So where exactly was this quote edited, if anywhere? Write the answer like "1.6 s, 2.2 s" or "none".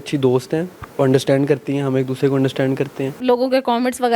3.2 s